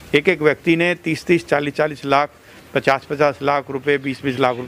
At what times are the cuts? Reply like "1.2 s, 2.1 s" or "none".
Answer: none